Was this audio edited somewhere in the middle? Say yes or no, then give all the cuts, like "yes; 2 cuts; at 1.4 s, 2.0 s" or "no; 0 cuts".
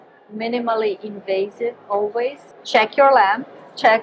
yes; 1 cut; at 2.5 s